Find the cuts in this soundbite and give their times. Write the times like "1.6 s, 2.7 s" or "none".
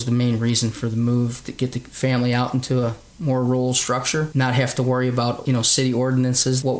none